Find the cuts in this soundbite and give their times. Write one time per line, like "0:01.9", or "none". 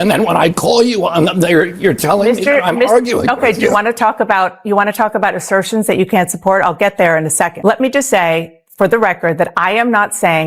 0:07.6